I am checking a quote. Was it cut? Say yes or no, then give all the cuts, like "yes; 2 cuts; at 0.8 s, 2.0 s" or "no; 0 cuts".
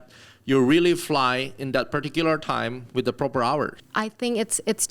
yes; 1 cut; at 3.8 s